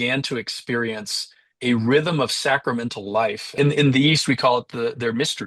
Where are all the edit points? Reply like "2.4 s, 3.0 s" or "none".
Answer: 3.4 s